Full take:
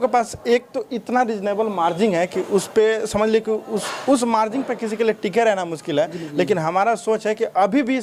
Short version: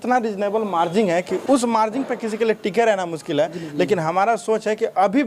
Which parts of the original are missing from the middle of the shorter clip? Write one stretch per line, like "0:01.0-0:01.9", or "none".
0:02.4-0:03.9